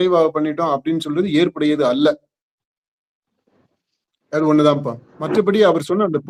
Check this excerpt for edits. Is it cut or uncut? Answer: uncut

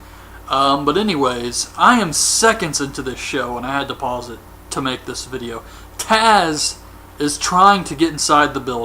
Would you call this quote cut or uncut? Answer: cut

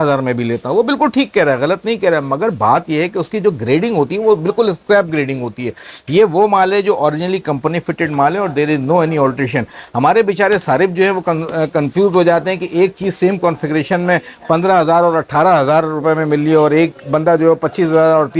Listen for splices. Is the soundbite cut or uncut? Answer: uncut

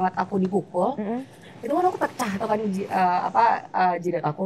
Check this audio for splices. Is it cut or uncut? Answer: uncut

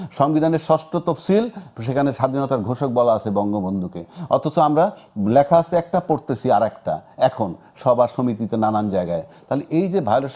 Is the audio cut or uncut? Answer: uncut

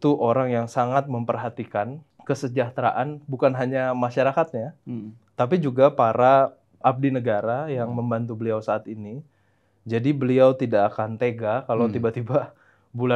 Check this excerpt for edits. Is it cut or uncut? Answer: uncut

